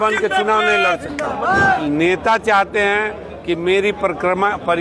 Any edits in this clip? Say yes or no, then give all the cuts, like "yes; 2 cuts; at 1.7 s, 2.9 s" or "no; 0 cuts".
yes; 1 cut; at 1.8 s